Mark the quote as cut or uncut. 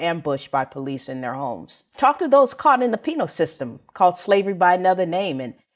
uncut